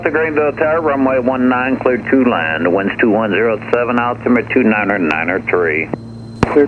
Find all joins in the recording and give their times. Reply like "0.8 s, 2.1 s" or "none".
none